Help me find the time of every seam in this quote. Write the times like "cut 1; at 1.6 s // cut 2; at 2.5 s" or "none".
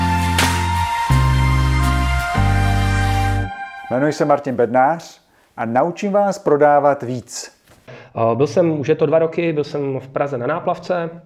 cut 1; at 3.7 s // cut 2; at 8.0 s